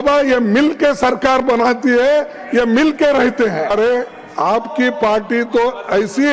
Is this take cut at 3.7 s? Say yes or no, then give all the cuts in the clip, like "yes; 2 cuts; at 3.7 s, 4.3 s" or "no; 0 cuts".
yes; 1 cut; at 3.7 s